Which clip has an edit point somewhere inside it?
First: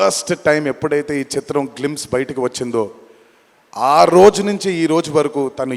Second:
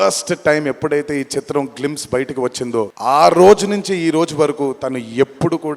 second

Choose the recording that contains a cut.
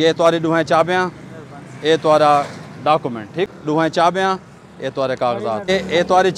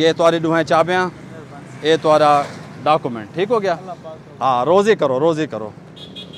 first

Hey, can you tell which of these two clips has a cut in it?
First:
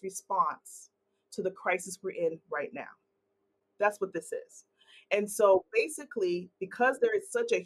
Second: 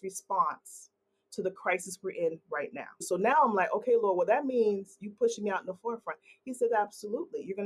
second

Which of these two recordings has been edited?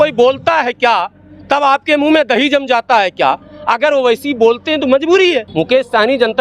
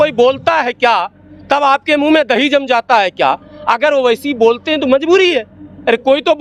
first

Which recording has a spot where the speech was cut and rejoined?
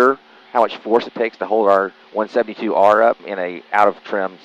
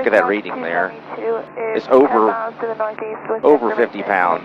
first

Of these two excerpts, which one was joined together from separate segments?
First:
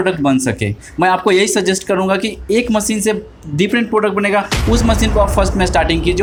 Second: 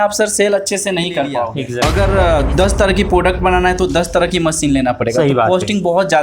second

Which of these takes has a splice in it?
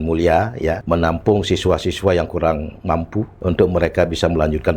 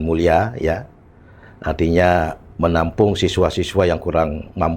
first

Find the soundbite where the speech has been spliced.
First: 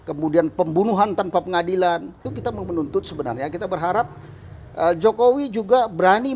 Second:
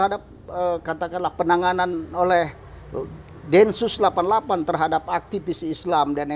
first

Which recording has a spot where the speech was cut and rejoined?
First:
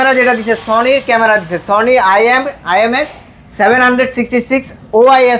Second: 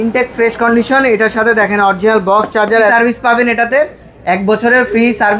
second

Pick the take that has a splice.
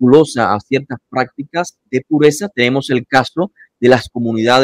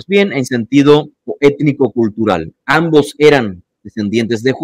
first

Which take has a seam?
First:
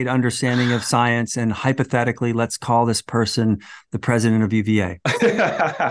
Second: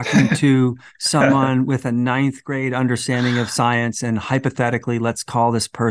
first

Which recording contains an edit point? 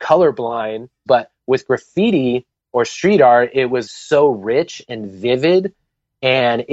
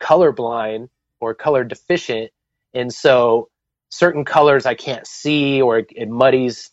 first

